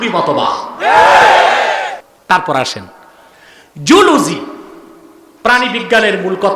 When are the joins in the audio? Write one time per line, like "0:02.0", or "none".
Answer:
0:02.1